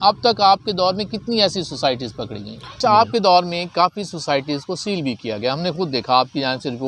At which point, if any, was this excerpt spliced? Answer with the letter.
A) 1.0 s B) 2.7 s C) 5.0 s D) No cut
B